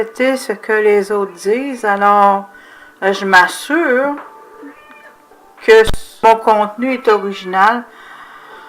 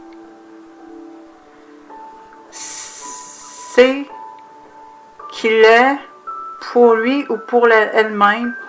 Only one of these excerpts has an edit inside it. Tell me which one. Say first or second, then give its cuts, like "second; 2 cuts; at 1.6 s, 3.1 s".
first; 1 cut; at 6.0 s